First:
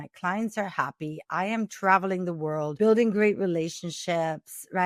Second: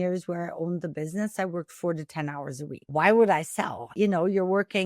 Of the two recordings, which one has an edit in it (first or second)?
second